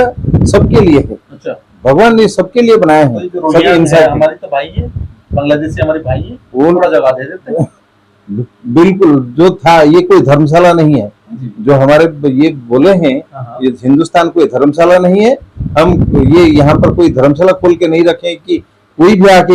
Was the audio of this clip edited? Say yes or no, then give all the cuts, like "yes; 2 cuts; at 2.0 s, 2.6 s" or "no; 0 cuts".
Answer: no; 0 cuts